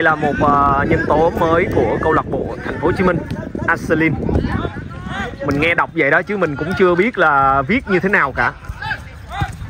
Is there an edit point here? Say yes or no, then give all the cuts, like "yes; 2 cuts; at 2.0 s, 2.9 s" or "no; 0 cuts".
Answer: no; 0 cuts